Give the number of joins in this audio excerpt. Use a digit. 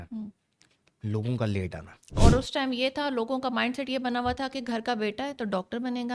1